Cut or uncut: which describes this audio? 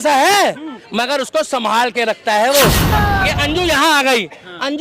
cut